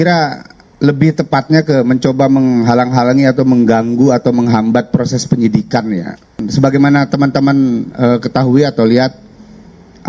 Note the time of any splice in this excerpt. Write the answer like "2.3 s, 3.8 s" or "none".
6.4 s